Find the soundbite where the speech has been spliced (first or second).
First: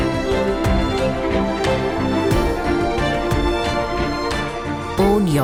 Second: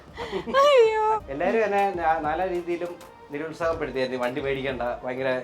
second